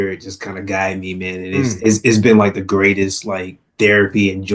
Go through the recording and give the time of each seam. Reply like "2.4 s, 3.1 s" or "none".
none